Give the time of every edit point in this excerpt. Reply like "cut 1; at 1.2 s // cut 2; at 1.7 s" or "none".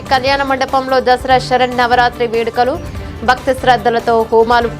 none